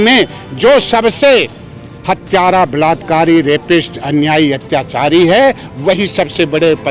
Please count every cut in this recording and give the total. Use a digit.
0